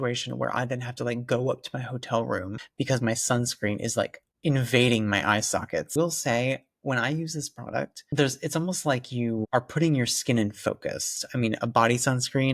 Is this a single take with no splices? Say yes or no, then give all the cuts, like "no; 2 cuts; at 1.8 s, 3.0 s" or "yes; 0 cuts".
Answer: no; 4 cuts; at 2.6 s, 5.9 s, 8.0 s, 11.2 s